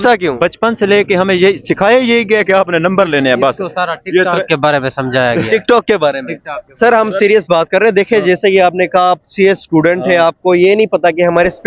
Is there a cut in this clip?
no; 0 cuts

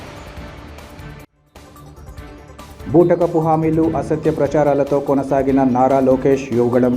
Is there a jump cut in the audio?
yes; 1 cut; at 2.6 s

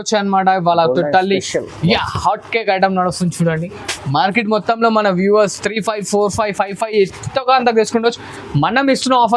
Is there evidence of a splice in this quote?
no; 0 cuts

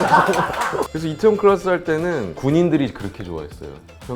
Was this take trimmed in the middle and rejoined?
yes; 2 cuts; at 0.8 s, 2.3 s

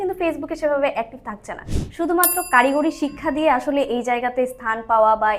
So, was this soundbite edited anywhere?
yes; 1 cut; at 1.7 s

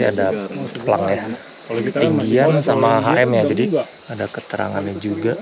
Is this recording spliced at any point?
yes; 2 cuts; at 1.4 s, 4.0 s

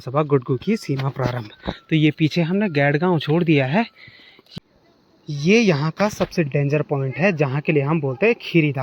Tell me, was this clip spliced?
yes; 1 cut; at 4.4 s

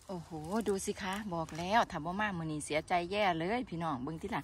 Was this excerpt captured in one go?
yes; 0 cuts

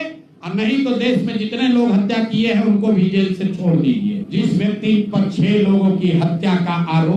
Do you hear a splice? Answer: yes; 1 cut; at 4.2 s

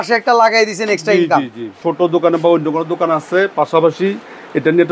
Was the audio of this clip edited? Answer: yes; 1 cut; at 1.8 s

